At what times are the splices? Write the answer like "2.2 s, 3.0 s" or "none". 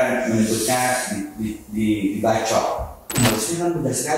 3.0 s